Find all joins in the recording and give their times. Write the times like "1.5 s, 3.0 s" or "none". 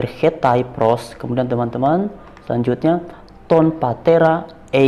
none